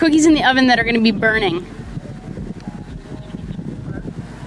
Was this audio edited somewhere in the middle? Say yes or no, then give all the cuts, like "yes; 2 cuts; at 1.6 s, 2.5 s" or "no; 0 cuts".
no; 0 cuts